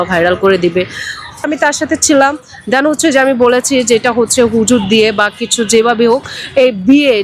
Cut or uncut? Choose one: cut